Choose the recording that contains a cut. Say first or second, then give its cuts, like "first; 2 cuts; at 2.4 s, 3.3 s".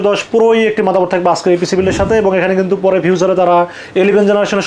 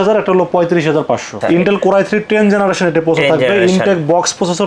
second; 1 cut; at 1.3 s